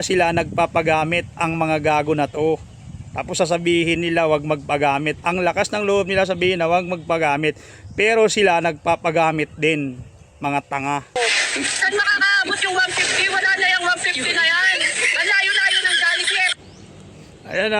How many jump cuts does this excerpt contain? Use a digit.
1